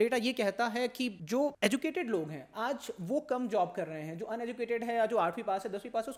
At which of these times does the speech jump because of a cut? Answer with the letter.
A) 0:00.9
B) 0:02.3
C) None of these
C